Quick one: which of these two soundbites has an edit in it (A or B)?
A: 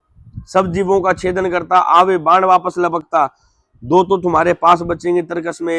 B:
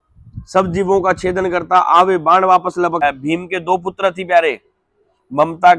B